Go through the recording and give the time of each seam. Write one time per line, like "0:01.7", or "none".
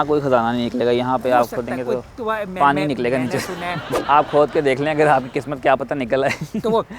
0:03.9